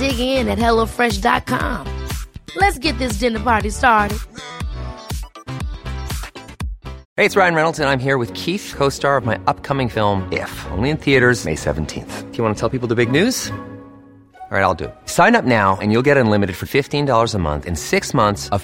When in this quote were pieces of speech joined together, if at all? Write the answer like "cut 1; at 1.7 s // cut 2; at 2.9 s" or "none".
cut 1; at 7.0 s